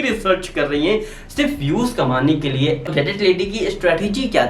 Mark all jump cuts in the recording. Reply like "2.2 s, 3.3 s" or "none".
2.8 s